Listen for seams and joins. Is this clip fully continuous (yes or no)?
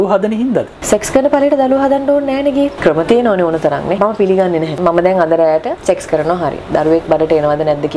no